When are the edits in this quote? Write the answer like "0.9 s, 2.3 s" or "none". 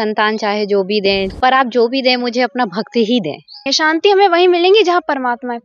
1.3 s, 3.7 s